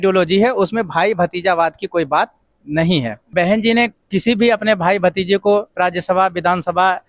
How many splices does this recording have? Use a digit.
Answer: 1